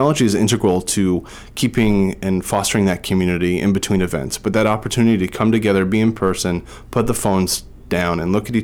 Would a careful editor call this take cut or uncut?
uncut